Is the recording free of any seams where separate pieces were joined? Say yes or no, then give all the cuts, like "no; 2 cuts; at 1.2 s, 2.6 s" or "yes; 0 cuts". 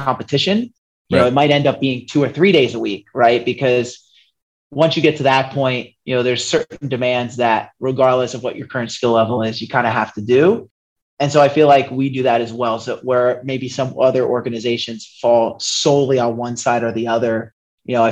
yes; 0 cuts